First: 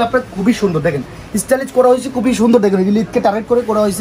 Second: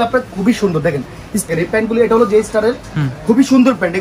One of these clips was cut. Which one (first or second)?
second